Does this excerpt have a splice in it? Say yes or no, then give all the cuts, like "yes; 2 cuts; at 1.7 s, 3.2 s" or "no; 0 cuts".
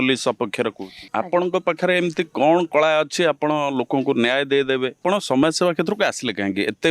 yes; 2 cuts; at 1.0 s, 5.0 s